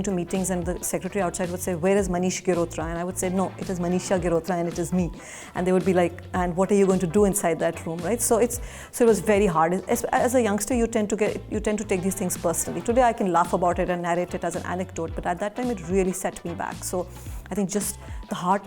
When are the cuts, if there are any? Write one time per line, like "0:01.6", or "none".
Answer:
none